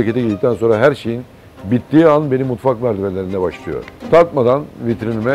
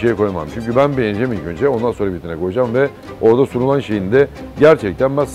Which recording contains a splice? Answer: first; 1 cut; at 3.9 s

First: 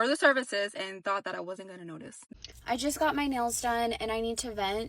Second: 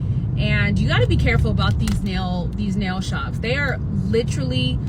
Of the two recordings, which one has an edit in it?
first; 1 cut; at 2.3 s

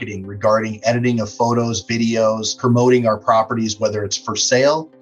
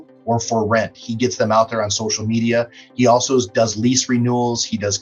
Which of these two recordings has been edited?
first; 1 cut; at 2.6 s

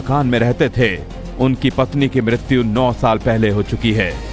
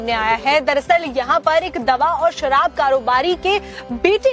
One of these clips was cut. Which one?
second; 1 cut; at 1.7 s

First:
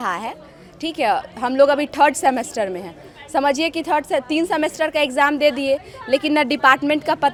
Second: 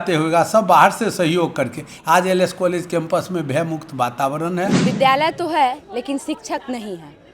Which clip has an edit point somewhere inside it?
second; 1 cut; at 4.8 s

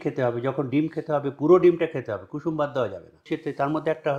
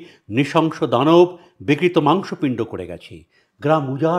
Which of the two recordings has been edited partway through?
first; 1 cut; at 3.2 s

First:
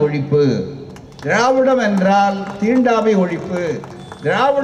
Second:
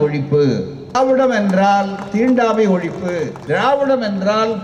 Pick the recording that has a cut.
second; 2 cuts; at 0.9 s, 3.3 s

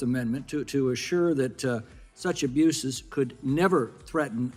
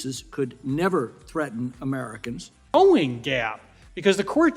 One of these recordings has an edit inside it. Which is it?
second; 1 cut; at 2.7 s

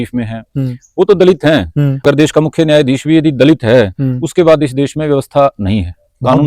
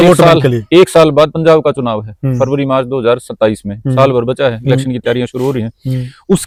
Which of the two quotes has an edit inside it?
first; 1 cut; at 2.0 s

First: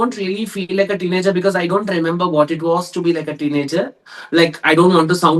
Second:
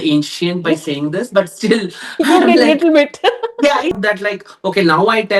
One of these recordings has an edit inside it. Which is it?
second; 1 cut; at 4.0 s

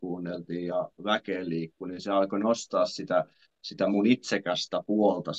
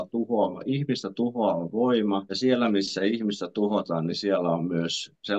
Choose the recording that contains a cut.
second; 1 cut; at 2.3 s

